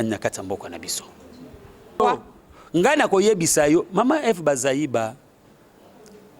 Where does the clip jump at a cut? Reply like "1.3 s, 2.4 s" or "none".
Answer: 2.0 s